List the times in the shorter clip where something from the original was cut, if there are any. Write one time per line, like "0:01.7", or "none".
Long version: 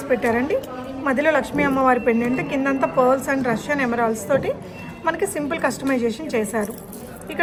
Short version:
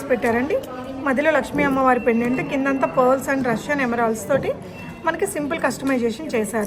none